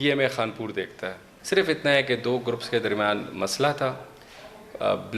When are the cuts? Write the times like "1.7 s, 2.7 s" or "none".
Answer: 1.3 s